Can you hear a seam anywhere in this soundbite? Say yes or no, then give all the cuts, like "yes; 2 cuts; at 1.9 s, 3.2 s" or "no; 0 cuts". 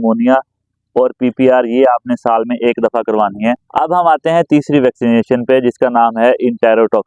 yes; 1 cut; at 3.6 s